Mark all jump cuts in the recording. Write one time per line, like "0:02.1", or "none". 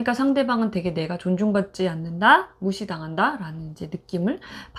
none